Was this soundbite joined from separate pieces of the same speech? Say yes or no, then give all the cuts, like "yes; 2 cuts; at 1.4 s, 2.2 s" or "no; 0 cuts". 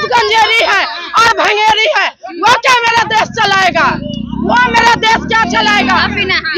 no; 0 cuts